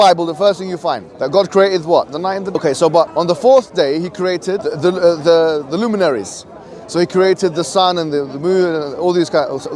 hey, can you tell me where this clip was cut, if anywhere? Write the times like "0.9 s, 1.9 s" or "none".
1.1 s, 2.6 s, 3.1 s, 4.7 s